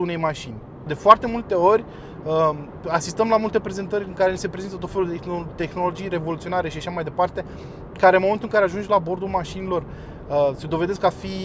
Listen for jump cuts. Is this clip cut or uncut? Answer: cut